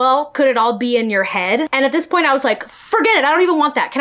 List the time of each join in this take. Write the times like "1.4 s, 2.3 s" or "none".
1.7 s